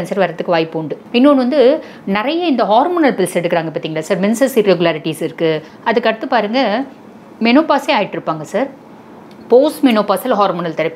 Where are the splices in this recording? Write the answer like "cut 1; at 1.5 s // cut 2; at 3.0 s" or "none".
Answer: cut 1; at 0.9 s // cut 2; at 5.7 s

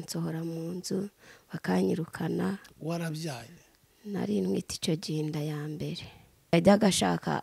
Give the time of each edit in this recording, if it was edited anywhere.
cut 1; at 6.5 s

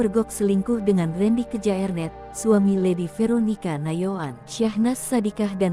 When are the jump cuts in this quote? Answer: none

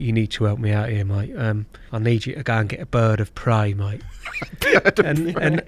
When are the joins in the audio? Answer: cut 1; at 1.8 s

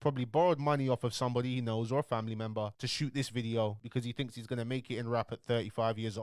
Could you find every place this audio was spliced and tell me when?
none

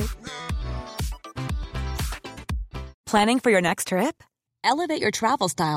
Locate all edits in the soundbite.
cut 1; at 2.9 s

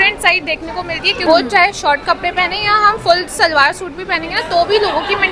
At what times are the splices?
cut 1; at 1.2 s

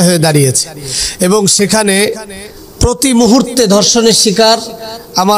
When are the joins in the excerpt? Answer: none

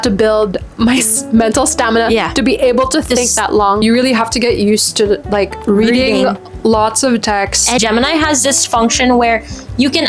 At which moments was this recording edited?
cut 1; at 3.8 s // cut 2; at 7.8 s

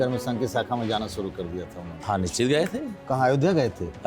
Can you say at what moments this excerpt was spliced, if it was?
cut 1; at 2.0 s

